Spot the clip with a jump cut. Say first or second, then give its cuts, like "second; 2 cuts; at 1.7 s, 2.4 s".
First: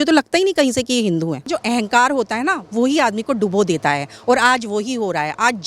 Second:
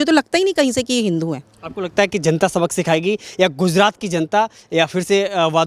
first; 1 cut; at 1.5 s